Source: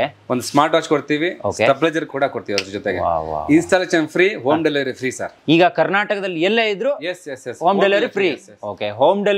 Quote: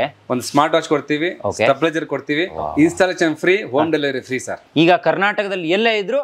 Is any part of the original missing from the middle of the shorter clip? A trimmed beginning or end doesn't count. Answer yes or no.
yes